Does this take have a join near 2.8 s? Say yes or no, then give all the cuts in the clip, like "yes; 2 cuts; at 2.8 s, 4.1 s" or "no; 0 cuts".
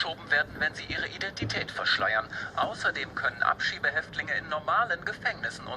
yes; 1 cut; at 2.8 s